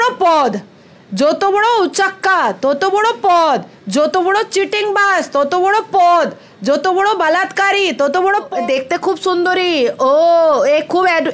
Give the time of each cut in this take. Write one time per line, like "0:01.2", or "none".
0:08.5